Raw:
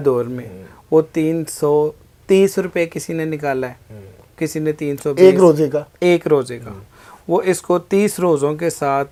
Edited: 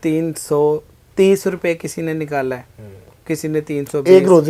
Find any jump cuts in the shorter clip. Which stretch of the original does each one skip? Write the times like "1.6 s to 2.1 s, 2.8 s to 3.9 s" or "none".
none